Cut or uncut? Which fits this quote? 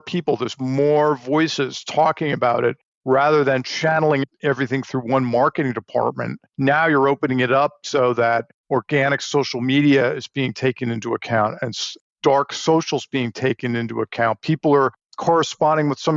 uncut